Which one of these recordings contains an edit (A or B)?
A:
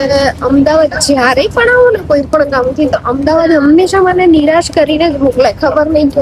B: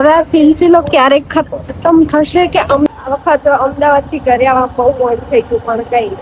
B